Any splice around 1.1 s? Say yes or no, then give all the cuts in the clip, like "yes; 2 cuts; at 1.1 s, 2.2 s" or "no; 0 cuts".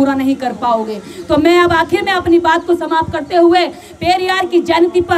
no; 0 cuts